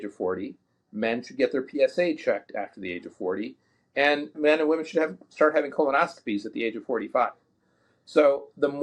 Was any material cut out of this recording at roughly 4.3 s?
yes; 1 cut; at 4.3 s

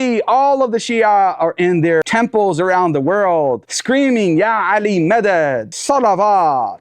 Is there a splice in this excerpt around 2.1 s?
yes; 1 cut; at 2.1 s

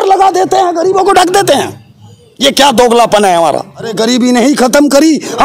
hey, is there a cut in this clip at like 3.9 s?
yes; 1 cut; at 3.9 s

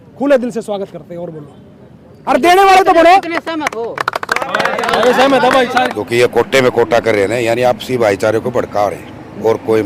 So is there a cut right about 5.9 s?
yes; 1 cut; at 5.9 s

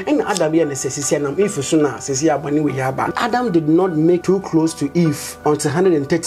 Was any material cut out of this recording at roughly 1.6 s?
no; 3 cuts; at 3.1 s, 4.2 s, 5.3 s

